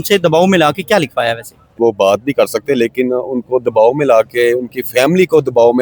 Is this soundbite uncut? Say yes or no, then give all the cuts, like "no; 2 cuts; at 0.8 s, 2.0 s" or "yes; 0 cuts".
no; 1 cut; at 1.8 s